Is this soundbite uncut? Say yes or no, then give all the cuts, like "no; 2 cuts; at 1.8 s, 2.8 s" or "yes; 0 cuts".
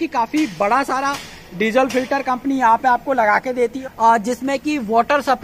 yes; 0 cuts